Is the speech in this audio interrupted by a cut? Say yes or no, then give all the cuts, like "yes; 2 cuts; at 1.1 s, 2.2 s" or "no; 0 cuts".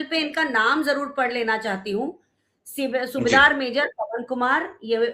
no; 0 cuts